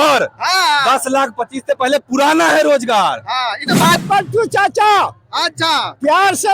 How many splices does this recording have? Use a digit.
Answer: 1